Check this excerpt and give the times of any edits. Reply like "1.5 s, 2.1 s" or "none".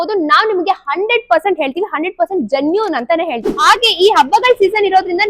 3.5 s